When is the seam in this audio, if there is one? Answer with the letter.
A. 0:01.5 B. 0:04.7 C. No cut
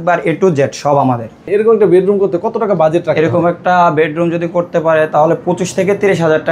A